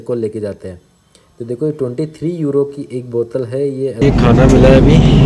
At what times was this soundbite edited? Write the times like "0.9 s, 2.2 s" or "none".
4.0 s